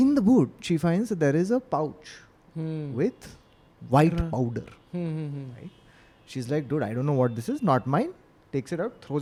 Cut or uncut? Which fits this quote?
uncut